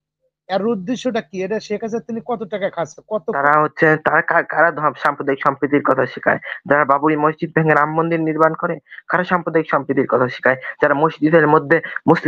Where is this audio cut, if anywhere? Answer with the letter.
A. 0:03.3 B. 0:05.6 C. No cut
A